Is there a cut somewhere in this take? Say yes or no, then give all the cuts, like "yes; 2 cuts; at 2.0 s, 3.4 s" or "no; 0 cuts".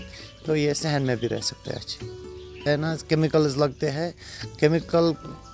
yes; 1 cut; at 2.5 s